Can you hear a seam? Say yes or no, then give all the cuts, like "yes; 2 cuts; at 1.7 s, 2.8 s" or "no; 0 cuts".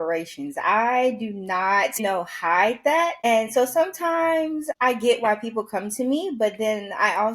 yes; 3 cuts; at 2.0 s, 3.2 s, 4.7 s